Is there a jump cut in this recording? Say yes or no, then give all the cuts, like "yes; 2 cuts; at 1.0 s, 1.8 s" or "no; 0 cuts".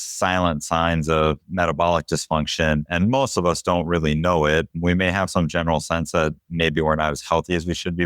no; 0 cuts